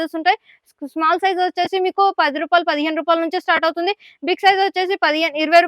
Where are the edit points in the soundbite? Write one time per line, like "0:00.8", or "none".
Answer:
none